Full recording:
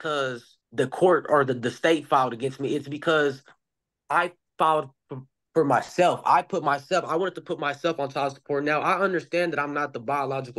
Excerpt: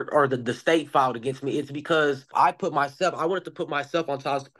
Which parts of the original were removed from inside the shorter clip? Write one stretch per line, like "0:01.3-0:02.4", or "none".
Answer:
0:03.5-0:06.2